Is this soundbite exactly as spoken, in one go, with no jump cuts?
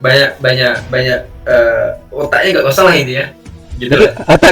yes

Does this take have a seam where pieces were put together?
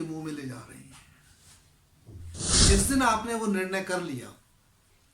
yes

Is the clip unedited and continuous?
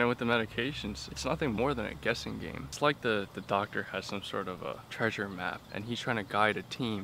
no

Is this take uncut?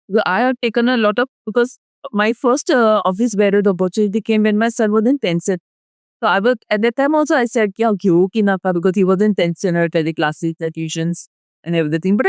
yes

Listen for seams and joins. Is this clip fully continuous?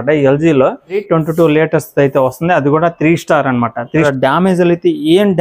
no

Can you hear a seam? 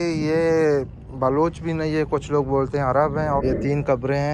yes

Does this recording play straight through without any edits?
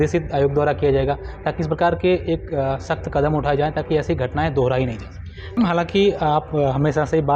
no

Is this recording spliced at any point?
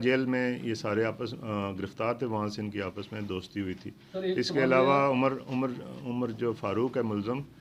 no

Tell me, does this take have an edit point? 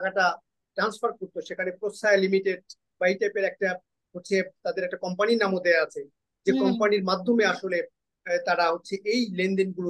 no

